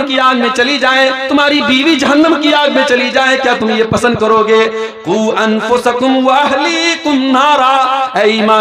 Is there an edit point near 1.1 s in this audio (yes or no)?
no